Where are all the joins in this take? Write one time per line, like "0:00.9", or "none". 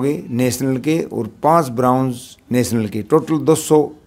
none